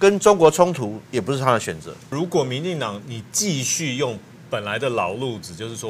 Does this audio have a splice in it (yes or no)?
yes